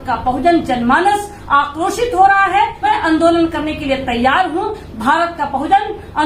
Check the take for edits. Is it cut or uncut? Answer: cut